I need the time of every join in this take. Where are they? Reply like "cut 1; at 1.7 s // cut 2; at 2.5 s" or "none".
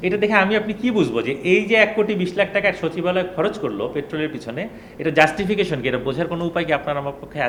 none